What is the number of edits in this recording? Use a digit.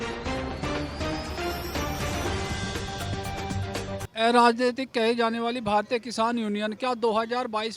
1